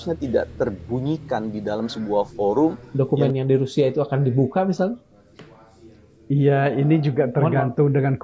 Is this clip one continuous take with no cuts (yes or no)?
no